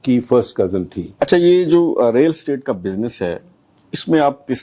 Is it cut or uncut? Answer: cut